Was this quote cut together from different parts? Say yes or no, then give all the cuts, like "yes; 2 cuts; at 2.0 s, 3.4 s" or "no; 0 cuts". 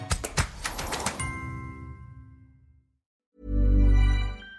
yes; 1 cut; at 3.2 s